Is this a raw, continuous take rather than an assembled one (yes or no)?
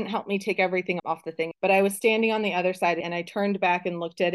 no